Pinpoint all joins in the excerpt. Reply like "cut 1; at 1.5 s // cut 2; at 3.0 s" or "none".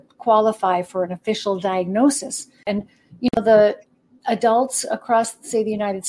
cut 1; at 2.8 s